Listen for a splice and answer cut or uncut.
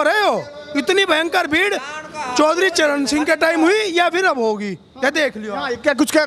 uncut